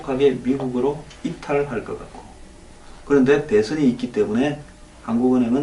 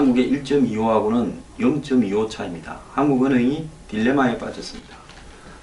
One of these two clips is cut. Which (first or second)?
first